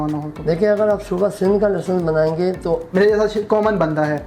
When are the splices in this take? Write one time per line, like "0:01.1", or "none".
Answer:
0:02.9